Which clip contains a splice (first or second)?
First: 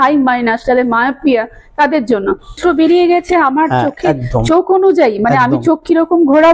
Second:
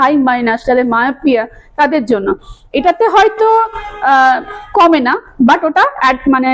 first